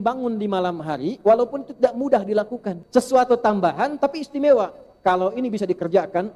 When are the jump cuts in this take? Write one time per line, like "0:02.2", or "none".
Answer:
0:02.7